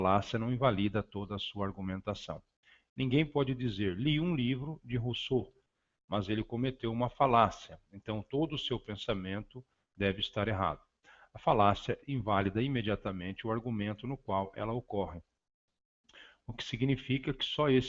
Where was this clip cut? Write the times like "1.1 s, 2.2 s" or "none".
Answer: 7.7 s

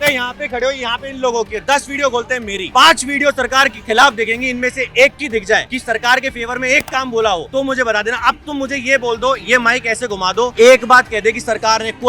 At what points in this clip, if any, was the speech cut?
2.6 s, 5.7 s, 7.5 s, 10.5 s

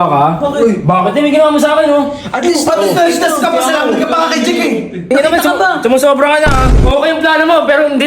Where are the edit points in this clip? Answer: 5.0 s, 6.8 s

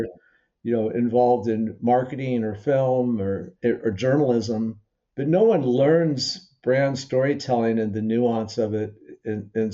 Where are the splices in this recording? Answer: none

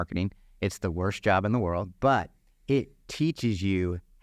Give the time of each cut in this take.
1.9 s

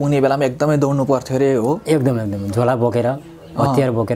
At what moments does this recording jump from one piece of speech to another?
none

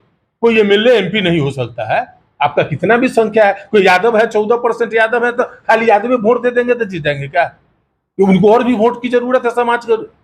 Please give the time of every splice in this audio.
none

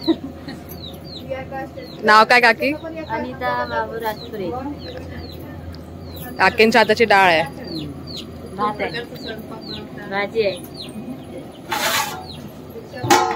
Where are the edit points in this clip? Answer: none

